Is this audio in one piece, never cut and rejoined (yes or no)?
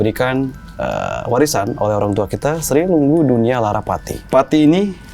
no